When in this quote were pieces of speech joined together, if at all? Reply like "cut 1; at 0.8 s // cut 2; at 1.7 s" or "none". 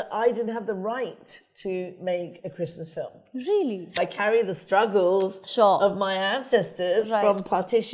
cut 1; at 4.0 s